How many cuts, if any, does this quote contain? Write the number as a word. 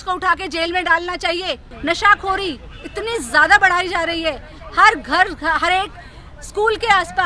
one